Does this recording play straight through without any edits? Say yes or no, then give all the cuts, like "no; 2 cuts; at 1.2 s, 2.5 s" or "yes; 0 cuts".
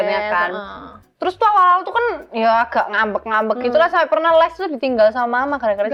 yes; 0 cuts